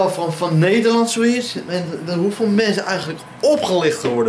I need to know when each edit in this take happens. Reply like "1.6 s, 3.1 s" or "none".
none